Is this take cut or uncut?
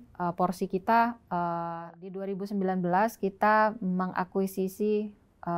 cut